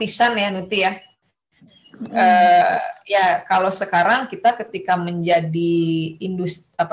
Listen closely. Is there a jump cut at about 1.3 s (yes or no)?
no